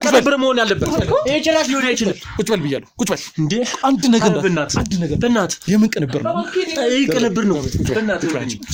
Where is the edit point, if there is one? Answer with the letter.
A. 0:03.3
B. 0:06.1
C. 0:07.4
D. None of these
D